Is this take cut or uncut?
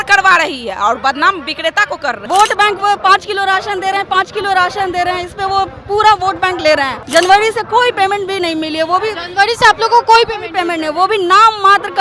cut